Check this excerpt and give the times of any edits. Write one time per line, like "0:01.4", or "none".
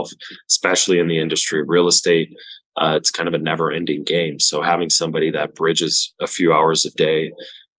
none